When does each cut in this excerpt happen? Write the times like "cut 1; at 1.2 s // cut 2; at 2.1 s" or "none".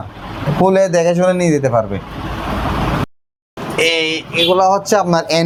none